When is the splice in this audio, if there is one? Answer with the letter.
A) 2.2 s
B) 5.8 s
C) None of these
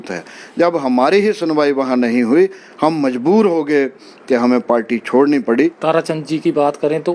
B